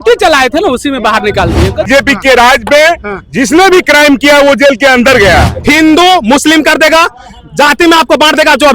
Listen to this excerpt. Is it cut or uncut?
cut